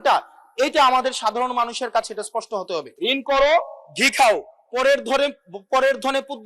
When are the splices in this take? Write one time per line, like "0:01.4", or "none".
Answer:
0:02.9